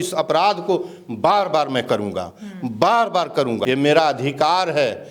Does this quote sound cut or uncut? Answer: cut